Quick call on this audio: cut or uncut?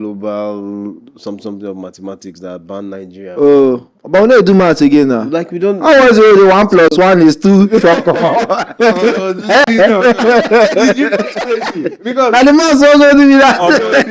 uncut